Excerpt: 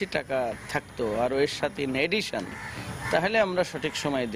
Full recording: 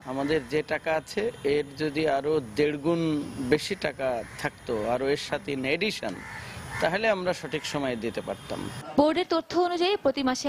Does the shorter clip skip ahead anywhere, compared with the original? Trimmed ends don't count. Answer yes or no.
no